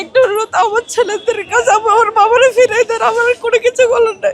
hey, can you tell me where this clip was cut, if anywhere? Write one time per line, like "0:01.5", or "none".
none